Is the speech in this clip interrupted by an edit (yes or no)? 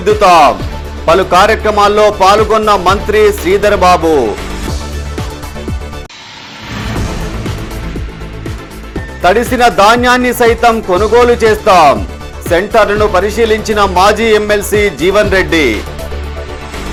no